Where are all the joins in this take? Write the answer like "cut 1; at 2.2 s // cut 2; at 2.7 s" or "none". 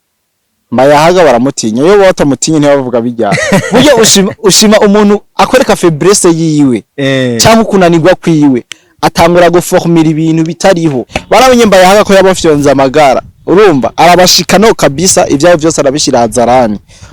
cut 1; at 11.1 s